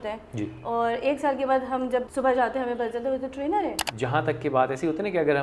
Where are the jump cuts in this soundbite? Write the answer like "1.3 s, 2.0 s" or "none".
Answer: 2.1 s, 3.8 s

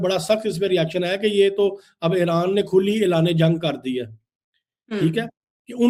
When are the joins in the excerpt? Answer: none

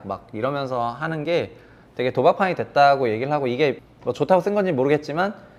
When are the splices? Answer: 3.9 s

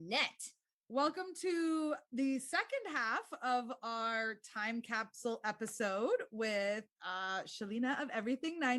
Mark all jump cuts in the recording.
none

